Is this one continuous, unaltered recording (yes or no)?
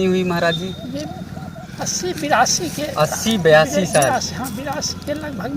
no